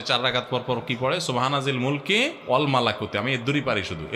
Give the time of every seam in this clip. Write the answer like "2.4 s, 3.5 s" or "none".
2.4 s